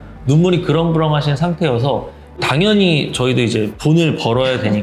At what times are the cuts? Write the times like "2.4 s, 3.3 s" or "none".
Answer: 2.4 s, 3.7 s